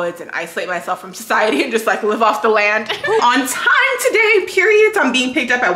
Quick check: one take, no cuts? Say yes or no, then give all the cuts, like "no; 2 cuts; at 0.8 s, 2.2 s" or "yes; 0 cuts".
no; 1 cut; at 3.2 s